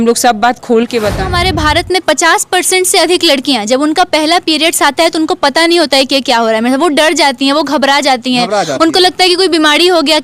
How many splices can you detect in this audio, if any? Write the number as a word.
one